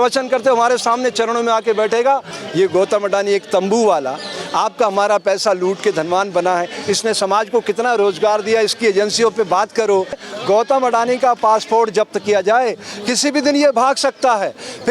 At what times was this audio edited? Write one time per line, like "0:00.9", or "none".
0:02.4
0:10.2